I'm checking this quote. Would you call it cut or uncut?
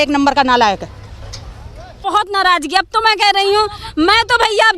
cut